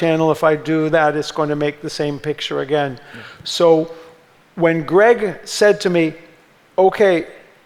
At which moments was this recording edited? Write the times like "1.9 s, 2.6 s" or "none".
none